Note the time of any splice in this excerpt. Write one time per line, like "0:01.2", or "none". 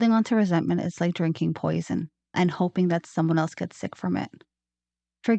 0:02.3